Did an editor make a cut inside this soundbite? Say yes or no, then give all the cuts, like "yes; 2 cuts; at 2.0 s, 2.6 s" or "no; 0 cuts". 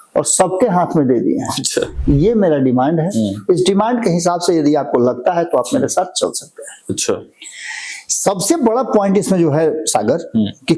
yes; 1 cut; at 1.9 s